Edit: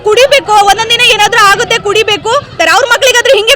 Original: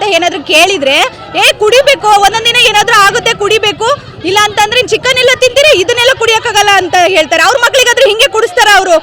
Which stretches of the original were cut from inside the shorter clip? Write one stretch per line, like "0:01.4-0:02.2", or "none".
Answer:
0:04.1-0:07.3

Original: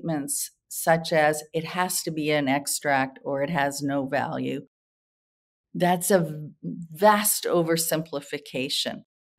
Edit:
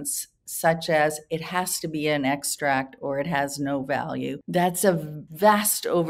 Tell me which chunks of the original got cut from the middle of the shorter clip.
0:04.6-0:05.7
0:06.5-0:06.8

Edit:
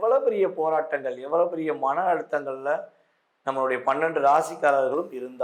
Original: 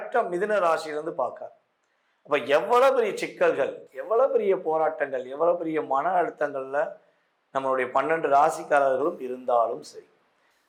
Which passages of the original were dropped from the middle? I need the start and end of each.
none

